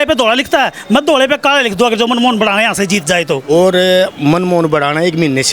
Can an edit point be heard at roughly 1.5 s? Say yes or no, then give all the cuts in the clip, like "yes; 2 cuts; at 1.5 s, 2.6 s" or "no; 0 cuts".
no; 1 cut; at 3.4 s